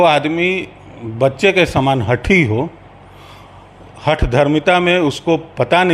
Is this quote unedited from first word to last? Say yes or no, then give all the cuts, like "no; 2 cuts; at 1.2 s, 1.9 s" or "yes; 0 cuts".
yes; 0 cuts